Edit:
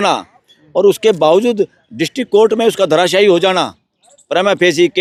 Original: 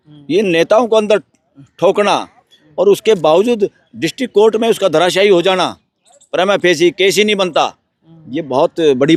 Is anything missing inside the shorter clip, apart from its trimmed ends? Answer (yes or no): no